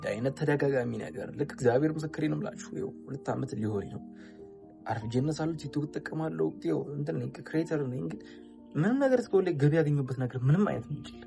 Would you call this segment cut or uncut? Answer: uncut